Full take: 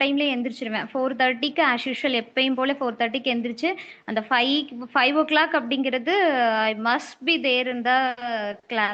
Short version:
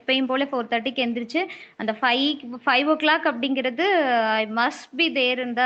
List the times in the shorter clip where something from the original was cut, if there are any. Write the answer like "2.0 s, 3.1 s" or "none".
none